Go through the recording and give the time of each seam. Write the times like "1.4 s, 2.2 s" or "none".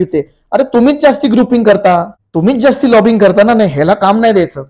2.2 s